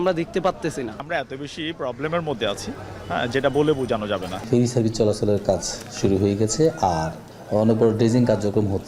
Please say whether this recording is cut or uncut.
cut